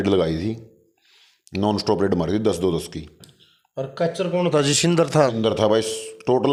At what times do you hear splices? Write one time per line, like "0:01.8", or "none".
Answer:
none